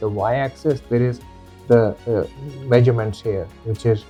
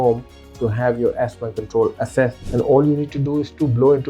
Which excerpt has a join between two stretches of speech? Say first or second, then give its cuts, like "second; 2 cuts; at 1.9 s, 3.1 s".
second; 1 cut; at 2.4 s